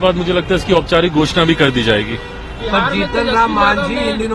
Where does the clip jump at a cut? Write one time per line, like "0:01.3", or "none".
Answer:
none